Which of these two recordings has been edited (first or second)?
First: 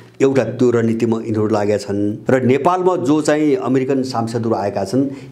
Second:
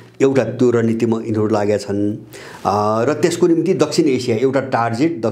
first